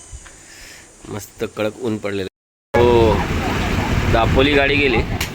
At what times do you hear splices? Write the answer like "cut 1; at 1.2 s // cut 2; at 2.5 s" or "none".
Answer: cut 1; at 2.3 s